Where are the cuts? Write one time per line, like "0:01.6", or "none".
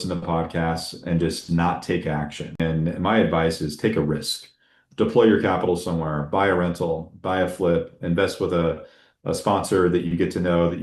0:02.6